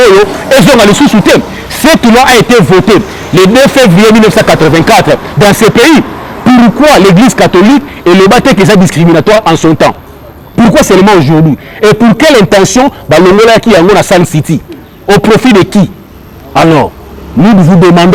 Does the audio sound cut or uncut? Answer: uncut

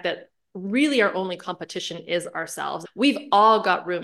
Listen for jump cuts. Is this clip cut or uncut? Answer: cut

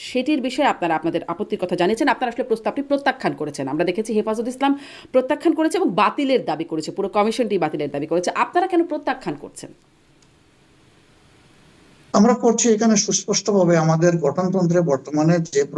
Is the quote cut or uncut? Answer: uncut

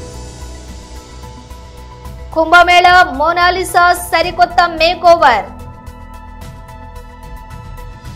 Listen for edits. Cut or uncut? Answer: uncut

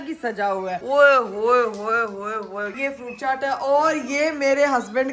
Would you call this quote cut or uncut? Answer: cut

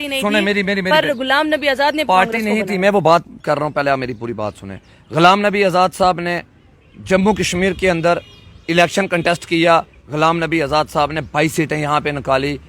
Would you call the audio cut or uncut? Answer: uncut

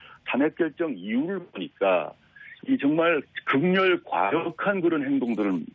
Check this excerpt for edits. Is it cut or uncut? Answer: uncut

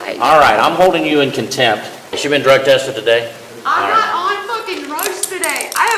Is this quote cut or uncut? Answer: cut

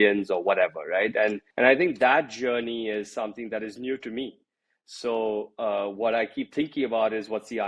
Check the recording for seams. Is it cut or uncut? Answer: cut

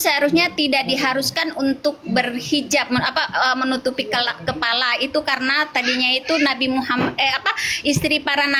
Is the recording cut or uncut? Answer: uncut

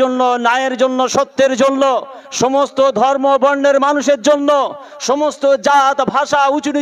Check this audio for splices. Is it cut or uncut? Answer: uncut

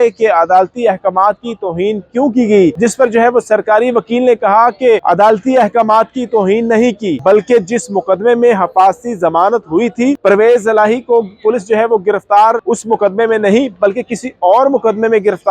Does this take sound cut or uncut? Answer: cut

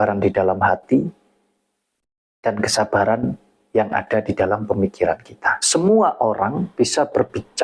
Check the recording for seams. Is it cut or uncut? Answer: cut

